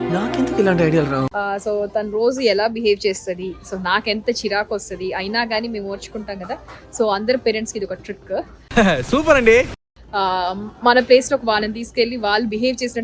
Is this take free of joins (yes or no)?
yes